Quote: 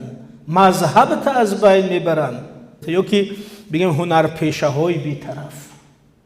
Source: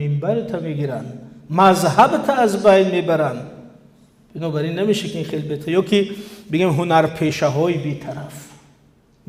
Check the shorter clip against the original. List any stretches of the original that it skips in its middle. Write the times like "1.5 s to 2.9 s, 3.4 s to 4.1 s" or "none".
3.8 s to 5.6 s